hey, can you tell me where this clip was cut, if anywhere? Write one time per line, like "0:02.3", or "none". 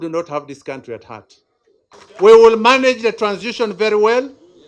0:02.0